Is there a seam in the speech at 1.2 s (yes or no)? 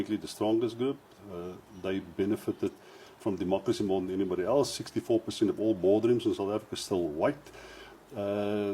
no